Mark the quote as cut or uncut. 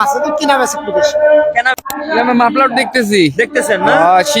cut